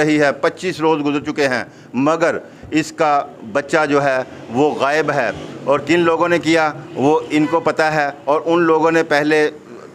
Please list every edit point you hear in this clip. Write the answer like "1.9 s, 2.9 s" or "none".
none